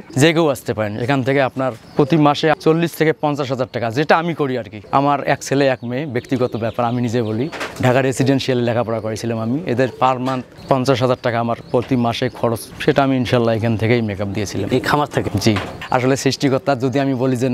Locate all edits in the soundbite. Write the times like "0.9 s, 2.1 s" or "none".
none